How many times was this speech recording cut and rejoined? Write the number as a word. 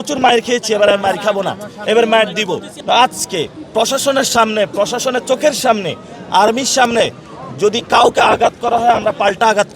one